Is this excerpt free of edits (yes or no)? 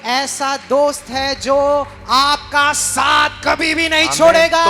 yes